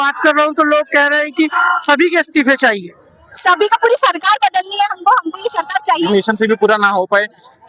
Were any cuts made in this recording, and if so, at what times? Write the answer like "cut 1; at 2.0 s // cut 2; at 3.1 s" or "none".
cut 1; at 6.1 s

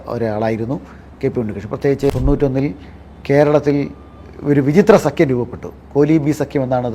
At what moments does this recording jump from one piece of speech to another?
cut 1; at 2.1 s

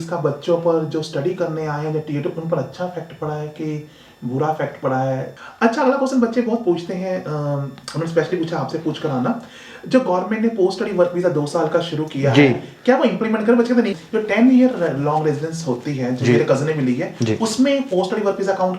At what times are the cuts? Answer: cut 1; at 5.3 s // cut 2; at 14.0 s

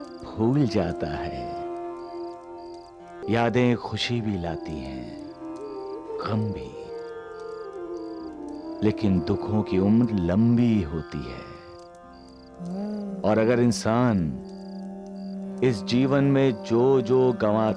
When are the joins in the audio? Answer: cut 1; at 3.2 s

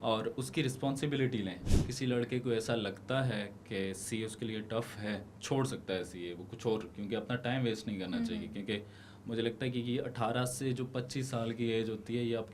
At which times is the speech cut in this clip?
cut 1; at 1.7 s // cut 2; at 5.3 s

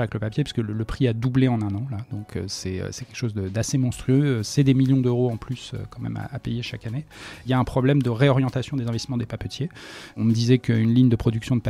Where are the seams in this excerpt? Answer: cut 1; at 4.5 s // cut 2; at 7.4 s // cut 3; at 10.2 s

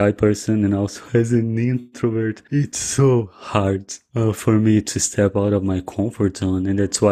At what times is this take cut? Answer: none

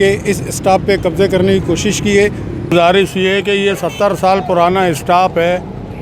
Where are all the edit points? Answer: cut 1; at 2.7 s

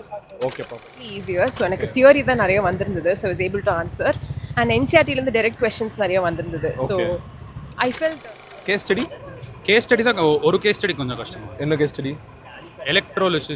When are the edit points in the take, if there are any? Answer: cut 1; at 1.1 s // cut 2; at 8.2 s

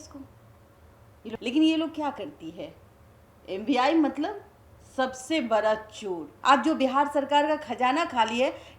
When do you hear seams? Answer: cut 1; at 1.3 s // cut 2; at 6.3 s

